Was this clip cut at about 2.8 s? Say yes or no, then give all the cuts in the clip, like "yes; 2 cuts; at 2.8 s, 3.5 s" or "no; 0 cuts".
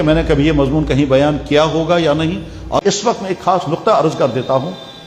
yes; 1 cut; at 2.8 s